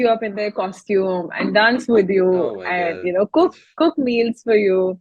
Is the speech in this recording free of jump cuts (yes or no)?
yes